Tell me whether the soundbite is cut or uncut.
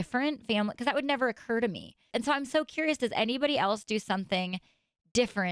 cut